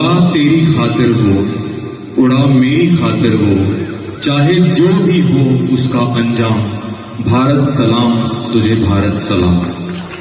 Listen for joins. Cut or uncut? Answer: uncut